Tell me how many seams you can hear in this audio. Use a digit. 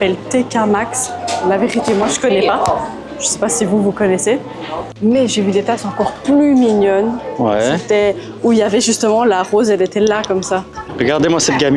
2